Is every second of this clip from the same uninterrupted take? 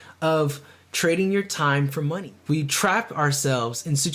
no; 1 cut; at 2.2 s

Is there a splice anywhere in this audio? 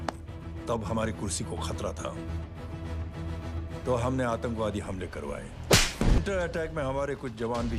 yes; 1 cut; at 6.2 s

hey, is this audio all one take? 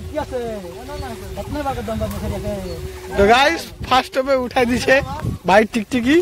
yes; 0 cuts

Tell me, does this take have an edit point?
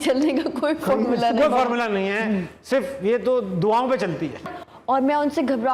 yes; 1 cut; at 4.4 s

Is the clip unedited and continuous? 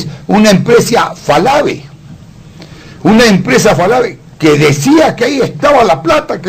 no; 1 cut; at 4.8 s

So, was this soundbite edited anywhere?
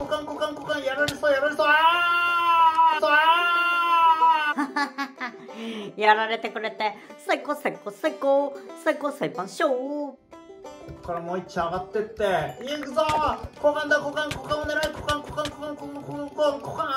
no; 0 cuts

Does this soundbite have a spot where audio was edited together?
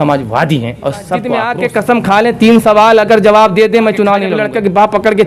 yes; 2 cuts; at 1.4 s, 4.3 s

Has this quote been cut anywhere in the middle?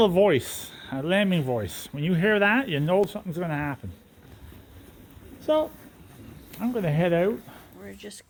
no; 0 cuts

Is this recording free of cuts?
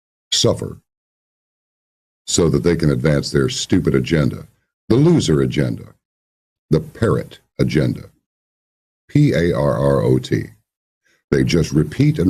yes; 0 cuts

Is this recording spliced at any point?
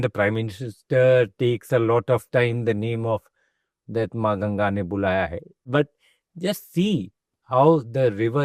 yes; 1 cut; at 5.7 s

